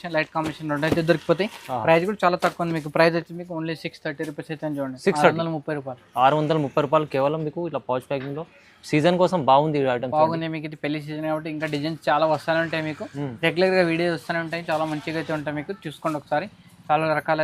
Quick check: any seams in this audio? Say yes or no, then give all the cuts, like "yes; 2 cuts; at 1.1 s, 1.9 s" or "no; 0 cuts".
no; 0 cuts